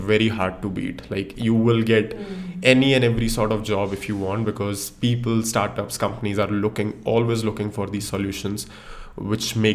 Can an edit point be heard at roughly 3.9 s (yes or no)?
no